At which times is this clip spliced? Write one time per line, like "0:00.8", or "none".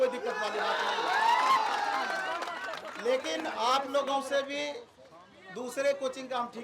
none